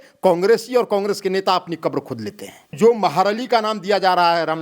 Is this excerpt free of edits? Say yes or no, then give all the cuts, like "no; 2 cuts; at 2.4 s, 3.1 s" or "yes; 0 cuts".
no; 1 cut; at 2.7 s